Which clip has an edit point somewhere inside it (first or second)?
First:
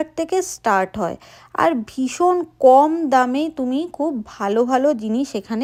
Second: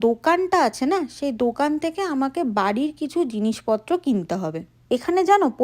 second